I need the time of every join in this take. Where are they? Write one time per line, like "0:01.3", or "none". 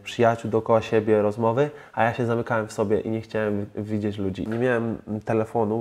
0:04.4